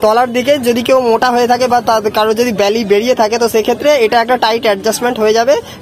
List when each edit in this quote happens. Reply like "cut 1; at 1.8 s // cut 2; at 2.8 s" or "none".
none